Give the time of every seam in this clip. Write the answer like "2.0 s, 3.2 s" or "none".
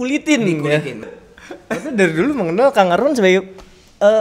1.1 s